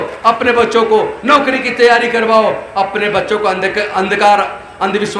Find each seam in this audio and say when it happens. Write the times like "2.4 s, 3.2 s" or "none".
none